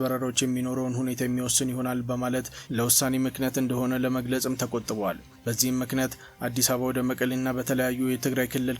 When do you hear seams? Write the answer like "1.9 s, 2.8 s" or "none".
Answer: none